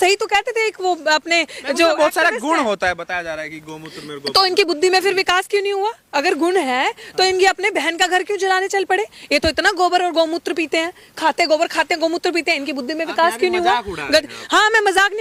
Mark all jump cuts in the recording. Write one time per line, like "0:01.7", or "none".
none